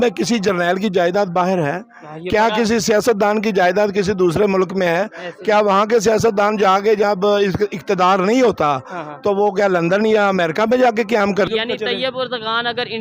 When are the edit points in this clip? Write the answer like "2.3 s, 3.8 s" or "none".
11.5 s